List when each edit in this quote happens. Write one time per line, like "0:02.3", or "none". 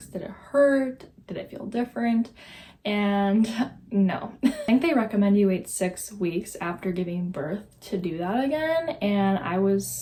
none